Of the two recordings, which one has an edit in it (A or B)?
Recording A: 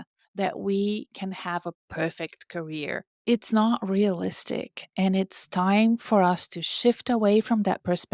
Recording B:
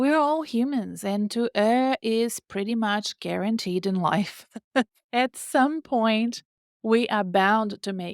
A